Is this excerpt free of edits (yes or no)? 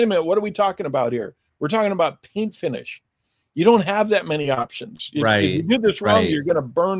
yes